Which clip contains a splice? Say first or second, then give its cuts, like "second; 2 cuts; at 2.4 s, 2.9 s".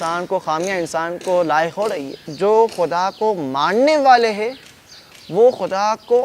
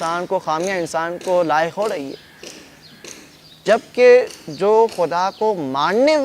first; 1 cut; at 2.2 s